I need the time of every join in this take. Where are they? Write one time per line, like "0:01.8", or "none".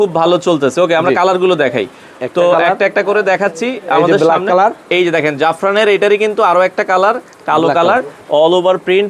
0:08.2